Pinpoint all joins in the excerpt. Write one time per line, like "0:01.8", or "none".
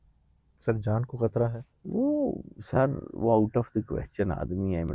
0:01.7